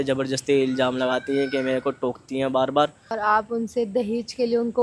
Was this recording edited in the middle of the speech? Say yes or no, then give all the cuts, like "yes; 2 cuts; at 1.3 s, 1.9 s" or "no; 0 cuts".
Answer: yes; 1 cut; at 3.2 s